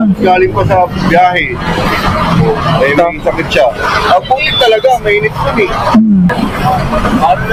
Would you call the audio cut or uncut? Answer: uncut